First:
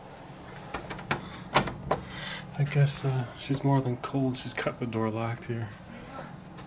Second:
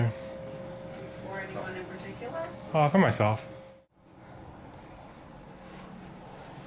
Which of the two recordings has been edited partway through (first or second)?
second